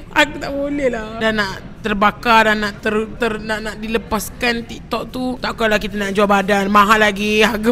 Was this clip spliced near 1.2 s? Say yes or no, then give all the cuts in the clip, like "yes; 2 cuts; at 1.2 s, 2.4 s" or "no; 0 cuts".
yes; 1 cut; at 1.2 s